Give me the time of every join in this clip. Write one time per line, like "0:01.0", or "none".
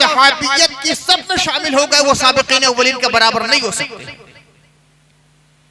none